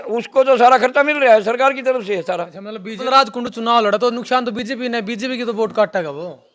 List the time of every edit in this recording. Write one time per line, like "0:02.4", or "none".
0:03.0